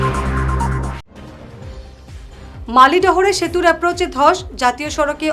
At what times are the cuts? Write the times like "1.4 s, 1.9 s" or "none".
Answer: 2.0 s